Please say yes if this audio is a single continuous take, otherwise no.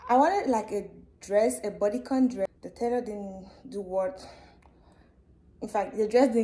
no